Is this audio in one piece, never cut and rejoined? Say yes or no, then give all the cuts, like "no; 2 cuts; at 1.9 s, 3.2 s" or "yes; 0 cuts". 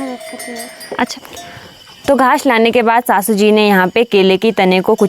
no; 1 cut; at 1.1 s